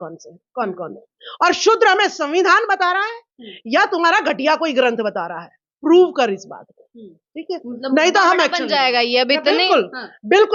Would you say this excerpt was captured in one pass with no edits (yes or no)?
yes